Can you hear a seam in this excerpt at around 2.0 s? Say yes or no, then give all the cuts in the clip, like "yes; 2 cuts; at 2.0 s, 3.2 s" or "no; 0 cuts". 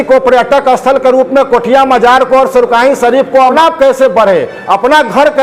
no; 1 cut; at 3.5 s